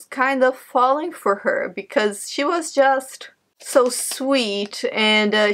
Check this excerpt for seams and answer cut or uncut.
uncut